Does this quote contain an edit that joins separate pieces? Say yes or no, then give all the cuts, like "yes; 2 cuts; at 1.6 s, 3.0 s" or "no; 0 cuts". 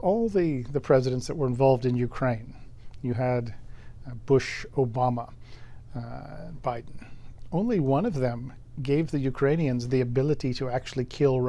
no; 0 cuts